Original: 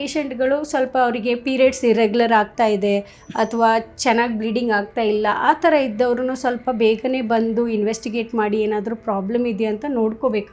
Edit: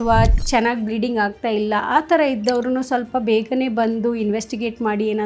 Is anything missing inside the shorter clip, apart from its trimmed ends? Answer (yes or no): no